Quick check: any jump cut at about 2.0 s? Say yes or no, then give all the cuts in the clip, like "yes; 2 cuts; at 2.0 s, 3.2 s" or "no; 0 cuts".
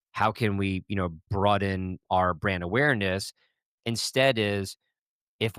yes; 2 cuts; at 1.3 s, 2.0 s